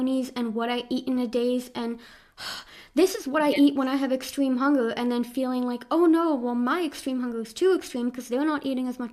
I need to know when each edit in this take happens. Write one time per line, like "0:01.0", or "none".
none